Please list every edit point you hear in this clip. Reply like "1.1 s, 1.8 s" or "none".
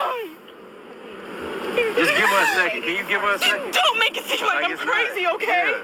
4.2 s

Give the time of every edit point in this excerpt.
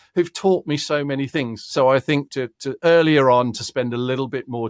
2.3 s

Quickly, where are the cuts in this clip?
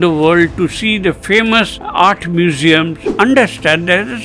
3.1 s

